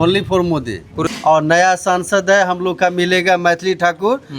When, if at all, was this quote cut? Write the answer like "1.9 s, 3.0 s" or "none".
1.1 s